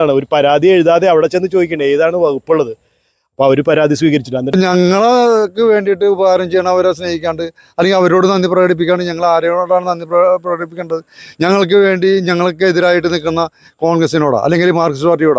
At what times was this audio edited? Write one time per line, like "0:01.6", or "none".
0:04.5